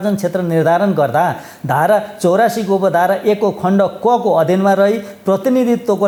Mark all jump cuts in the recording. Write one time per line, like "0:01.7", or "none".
none